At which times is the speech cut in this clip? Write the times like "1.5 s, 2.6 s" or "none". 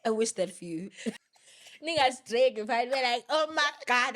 1.2 s

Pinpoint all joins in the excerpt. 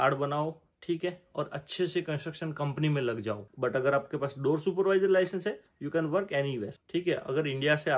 3.5 s, 6.8 s

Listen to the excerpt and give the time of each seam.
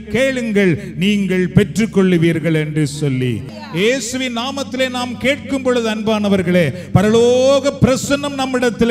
3.5 s

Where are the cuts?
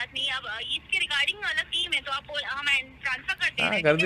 none

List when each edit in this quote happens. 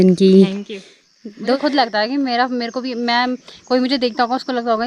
1.5 s

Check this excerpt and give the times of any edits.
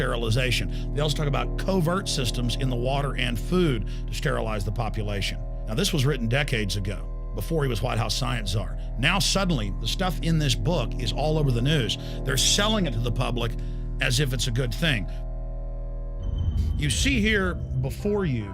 10.2 s

